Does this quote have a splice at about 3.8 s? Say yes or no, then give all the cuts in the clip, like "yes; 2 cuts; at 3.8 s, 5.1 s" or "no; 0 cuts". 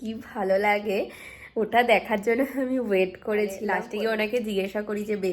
yes; 1 cut; at 3.8 s